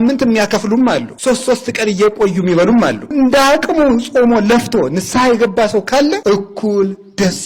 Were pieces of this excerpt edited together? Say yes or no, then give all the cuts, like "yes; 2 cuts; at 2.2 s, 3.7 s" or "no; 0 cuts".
yes; 3 cuts; at 1.1 s, 3.1 s, 6.2 s